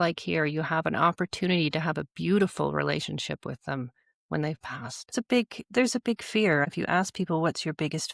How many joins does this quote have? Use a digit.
2